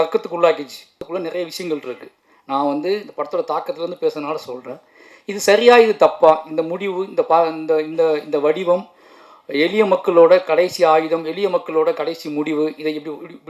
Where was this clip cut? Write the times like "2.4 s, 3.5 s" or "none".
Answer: 1.0 s